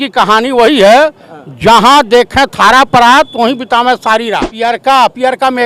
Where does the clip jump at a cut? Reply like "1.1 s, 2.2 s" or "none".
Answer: 4.5 s